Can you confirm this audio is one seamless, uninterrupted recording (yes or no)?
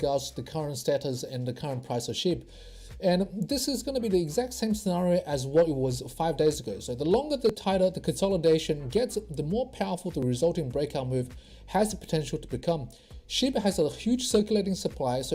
yes